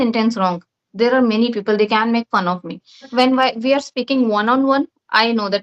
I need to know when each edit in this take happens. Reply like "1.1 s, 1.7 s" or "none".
3.1 s